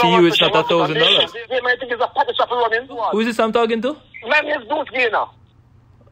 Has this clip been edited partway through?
yes; 2 cuts; at 1.4 s, 3.0 s

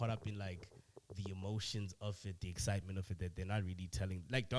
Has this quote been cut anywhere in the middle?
no; 0 cuts

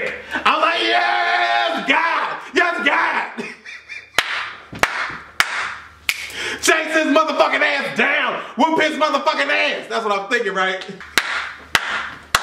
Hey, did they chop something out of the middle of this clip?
yes; 1 cut; at 11.0 s

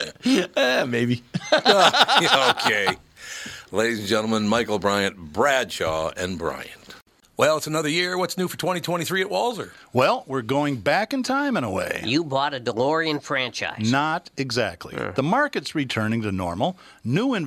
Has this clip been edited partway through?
yes; 1 cut; at 7.1 s

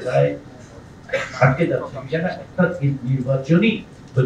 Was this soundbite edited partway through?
no; 0 cuts

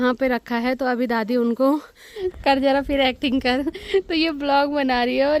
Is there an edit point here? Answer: yes; 1 cut; at 2.2 s

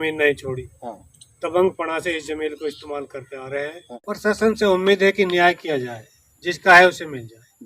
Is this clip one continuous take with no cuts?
no; 1 cut; at 3.9 s

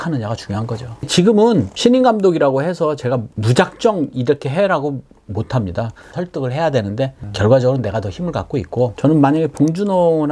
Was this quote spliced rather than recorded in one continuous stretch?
no; 0 cuts

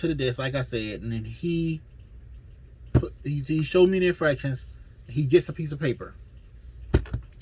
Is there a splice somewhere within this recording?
no; 0 cuts

